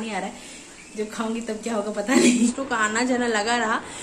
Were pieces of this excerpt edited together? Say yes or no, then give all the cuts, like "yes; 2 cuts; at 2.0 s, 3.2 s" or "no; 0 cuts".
yes; 1 cut; at 2.5 s